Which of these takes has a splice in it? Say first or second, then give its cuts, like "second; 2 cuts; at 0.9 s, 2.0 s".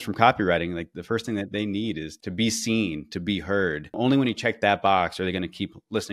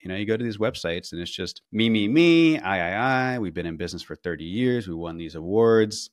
first; 3 cuts; at 0.9 s, 2.1 s, 4.0 s